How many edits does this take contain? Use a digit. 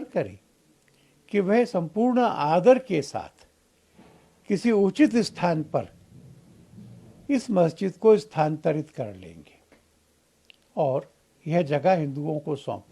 0